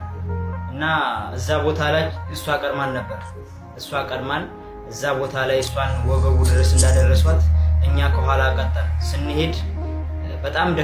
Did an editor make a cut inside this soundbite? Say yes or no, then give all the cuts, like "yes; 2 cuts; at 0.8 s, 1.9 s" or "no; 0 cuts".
no; 0 cuts